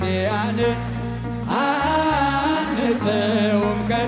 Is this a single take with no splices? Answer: yes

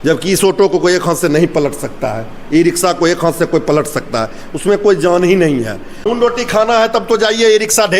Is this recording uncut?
no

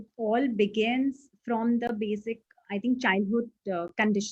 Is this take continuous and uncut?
yes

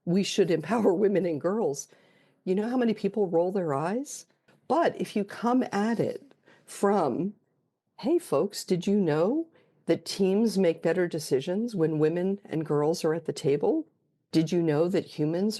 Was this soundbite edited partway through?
yes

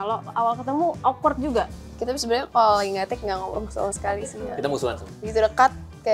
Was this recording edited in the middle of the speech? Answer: yes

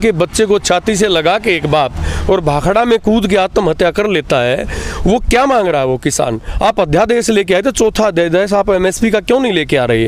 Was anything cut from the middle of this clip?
no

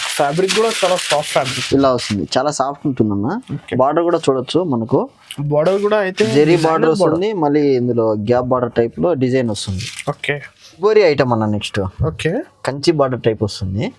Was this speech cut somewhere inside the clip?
yes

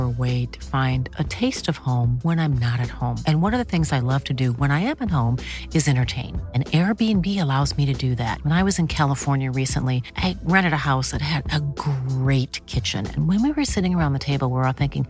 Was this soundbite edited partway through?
no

